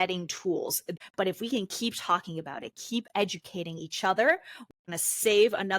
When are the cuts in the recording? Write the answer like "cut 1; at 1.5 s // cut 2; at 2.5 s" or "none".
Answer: cut 1; at 0.8 s // cut 2; at 4.8 s